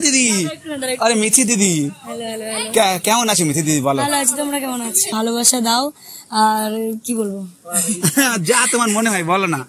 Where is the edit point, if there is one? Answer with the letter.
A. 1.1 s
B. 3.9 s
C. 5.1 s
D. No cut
C